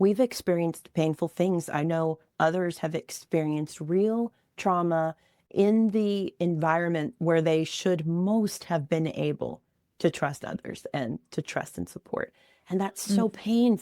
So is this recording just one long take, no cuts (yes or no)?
yes